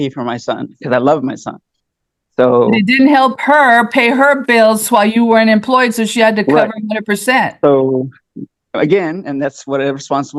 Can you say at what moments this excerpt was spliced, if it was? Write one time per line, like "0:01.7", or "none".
none